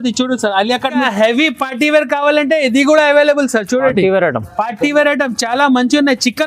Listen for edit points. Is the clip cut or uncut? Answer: cut